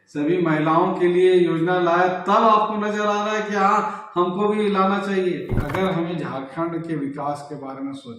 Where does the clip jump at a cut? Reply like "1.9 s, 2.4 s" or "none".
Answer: 5.6 s